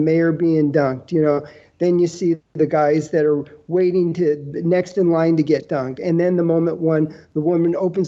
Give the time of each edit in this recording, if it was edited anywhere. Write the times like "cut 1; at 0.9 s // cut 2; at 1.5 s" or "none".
cut 1; at 2.5 s